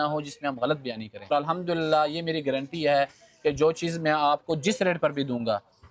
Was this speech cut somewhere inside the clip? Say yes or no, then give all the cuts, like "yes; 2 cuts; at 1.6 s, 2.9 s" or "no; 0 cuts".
no; 0 cuts